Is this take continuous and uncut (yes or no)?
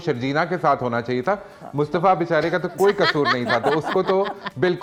yes